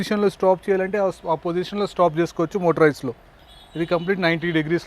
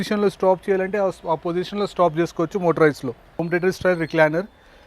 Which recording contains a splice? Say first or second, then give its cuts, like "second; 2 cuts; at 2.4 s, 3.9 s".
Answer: second; 1 cut; at 3.4 s